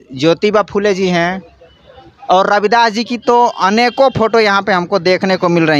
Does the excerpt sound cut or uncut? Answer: uncut